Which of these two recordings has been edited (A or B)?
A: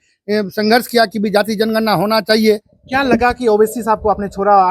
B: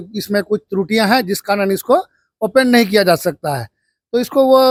A